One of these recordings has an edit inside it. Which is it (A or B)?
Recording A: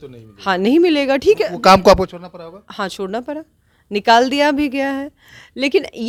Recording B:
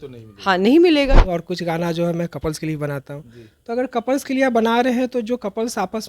B